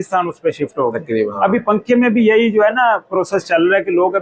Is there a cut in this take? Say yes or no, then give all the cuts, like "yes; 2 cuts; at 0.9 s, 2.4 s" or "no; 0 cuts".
yes; 1 cut; at 1.3 s